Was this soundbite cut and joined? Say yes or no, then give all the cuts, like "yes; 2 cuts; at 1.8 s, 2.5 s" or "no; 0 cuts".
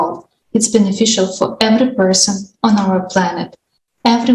no; 0 cuts